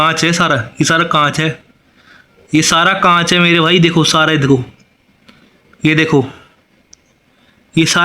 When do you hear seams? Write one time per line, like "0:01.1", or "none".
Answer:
none